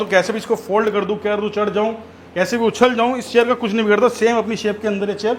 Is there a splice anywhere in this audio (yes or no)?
no